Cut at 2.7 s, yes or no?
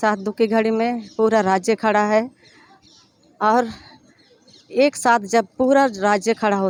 no